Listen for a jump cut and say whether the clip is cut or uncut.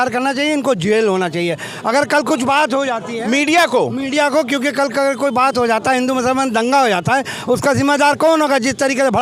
uncut